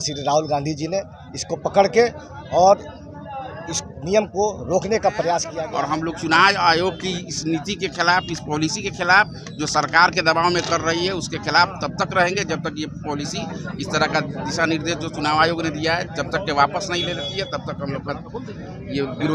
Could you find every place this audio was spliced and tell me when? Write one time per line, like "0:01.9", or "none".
0:05.6